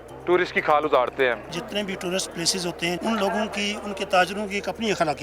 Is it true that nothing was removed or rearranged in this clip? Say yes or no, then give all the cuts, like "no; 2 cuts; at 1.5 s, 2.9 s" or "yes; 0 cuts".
no; 2 cuts; at 1.5 s, 3.0 s